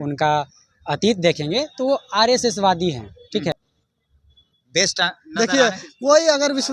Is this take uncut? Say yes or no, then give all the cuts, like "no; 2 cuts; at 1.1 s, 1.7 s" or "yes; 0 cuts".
no; 1 cut; at 3.5 s